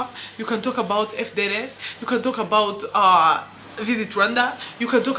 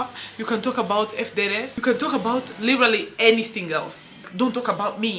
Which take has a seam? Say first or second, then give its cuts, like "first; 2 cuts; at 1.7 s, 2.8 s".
second; 2 cuts; at 1.7 s, 4.2 s